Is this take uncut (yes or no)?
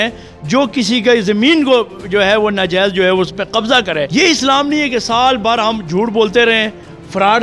no